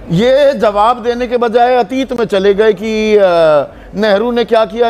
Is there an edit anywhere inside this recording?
no; 0 cuts

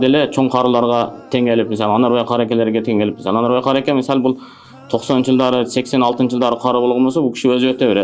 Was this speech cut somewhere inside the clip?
no; 0 cuts

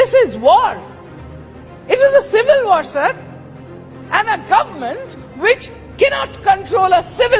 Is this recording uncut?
yes; 0 cuts

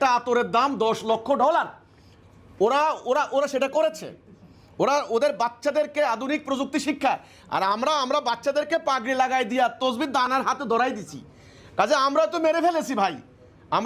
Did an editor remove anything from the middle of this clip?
no; 0 cuts

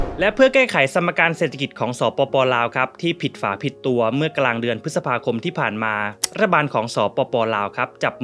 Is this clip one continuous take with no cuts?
yes; 0 cuts

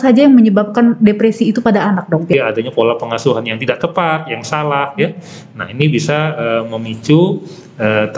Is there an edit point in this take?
yes; 1 cut; at 2.3 s

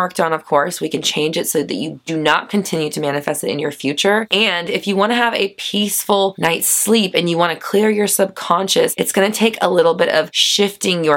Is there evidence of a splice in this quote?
no; 0 cuts

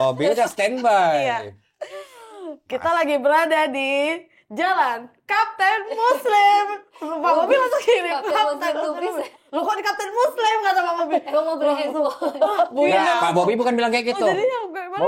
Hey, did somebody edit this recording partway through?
no; 0 cuts

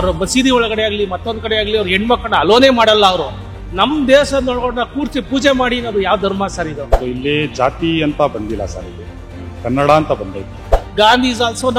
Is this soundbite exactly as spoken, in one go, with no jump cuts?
yes; 0 cuts

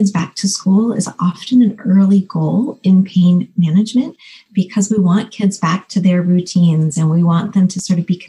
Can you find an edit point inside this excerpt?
no; 0 cuts

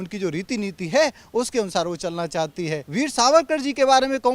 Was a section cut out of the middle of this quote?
yes; 1 cut; at 2.9 s

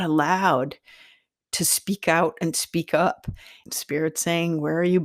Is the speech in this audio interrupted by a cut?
yes; 2 cuts; at 1.6 s, 3.6 s

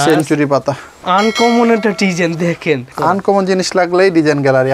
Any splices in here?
yes; 2 cuts; at 1.0 s, 2.9 s

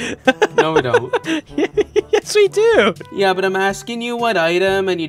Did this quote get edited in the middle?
yes; 2 cuts; at 1.3 s, 3.0 s

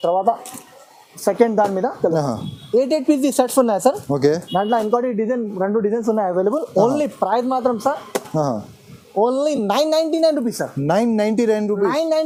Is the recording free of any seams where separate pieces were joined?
yes; 0 cuts

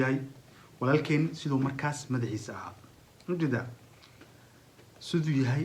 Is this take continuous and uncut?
yes; 0 cuts

